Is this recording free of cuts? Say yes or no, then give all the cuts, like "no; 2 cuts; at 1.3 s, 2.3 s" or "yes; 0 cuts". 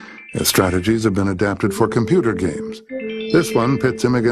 no; 1 cut; at 3.1 s